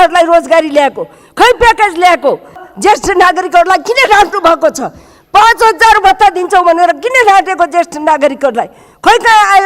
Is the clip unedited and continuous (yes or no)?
no